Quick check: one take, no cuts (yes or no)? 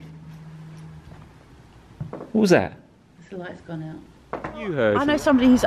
no